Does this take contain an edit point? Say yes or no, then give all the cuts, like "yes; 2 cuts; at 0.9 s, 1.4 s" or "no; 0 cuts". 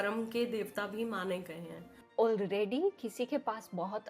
yes; 1 cut; at 1.9 s